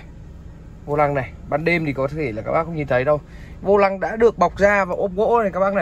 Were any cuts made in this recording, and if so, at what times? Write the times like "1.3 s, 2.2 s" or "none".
none